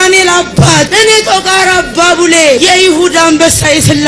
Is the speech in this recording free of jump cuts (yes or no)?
no